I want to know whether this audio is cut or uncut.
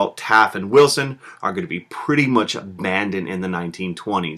cut